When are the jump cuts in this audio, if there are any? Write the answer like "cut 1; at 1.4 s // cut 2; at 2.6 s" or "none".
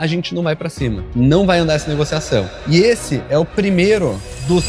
cut 1; at 1.1 s // cut 2; at 2.5 s